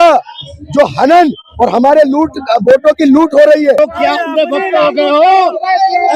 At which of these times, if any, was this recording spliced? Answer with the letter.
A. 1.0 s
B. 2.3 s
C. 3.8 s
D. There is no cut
C